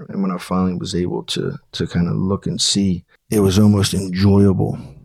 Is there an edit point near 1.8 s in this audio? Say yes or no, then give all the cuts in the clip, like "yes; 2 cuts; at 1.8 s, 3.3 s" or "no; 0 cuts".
no; 1 cut; at 3.1 s